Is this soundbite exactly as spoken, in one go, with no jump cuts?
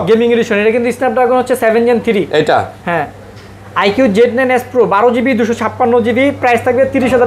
yes; 0 cuts

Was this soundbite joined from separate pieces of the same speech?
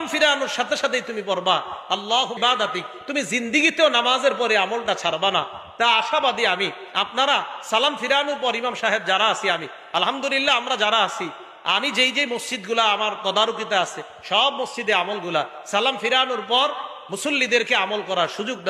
yes; 1 cut; at 2.4 s

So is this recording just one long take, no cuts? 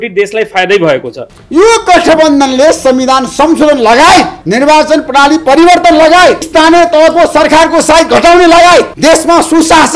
no; 1 cut; at 1.2 s

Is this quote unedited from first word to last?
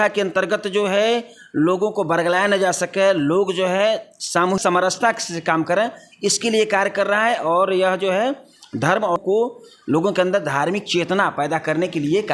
yes; 0 cuts

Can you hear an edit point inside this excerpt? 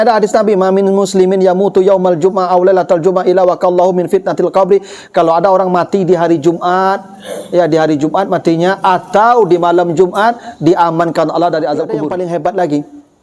yes; 1 cut; at 12.1 s

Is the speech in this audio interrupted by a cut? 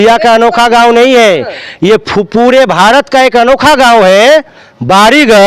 no; 0 cuts

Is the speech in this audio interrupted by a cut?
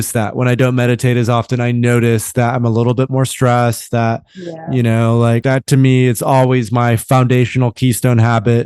yes; 1 cut; at 5.4 s

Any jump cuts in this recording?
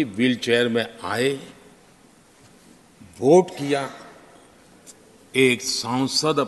no; 0 cuts

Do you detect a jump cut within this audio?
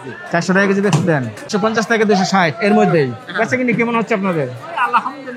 yes; 1 cut; at 1.5 s

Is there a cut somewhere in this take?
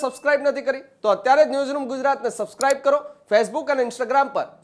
no; 0 cuts

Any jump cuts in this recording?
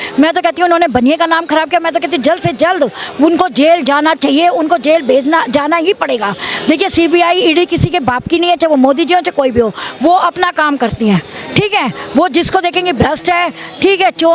no; 0 cuts

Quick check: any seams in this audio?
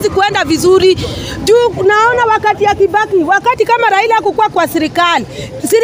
no; 0 cuts

